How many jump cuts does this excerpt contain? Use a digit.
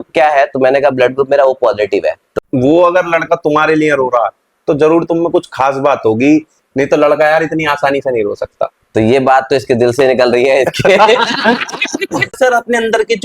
2